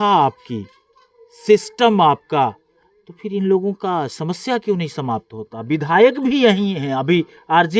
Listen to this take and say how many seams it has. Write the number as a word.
zero